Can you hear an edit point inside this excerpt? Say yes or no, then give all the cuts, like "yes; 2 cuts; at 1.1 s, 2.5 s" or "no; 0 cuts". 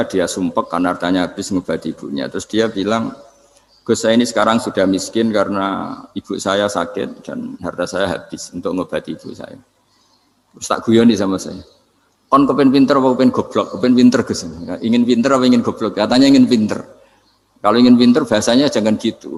no; 0 cuts